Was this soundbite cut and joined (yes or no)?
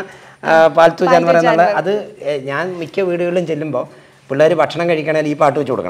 no